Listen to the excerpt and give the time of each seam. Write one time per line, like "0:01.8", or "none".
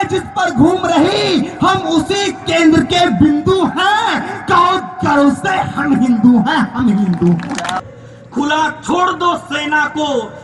0:07.8